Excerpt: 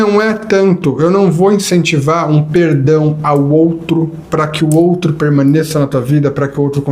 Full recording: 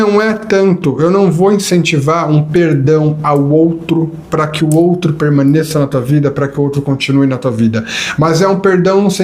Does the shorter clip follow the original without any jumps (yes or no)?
yes